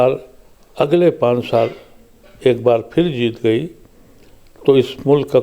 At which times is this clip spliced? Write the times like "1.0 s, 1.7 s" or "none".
none